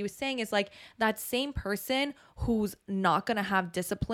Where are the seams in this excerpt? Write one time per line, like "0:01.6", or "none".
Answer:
none